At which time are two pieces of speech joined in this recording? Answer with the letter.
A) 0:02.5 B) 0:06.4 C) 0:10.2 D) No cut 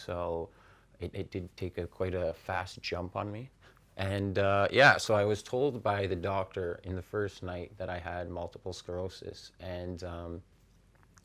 D